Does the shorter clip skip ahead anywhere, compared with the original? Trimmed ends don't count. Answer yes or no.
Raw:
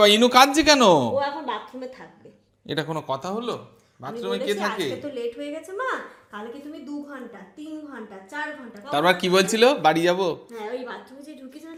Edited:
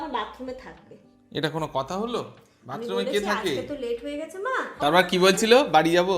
yes